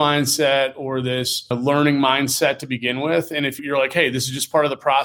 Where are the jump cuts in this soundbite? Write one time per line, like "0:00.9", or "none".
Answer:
0:01.5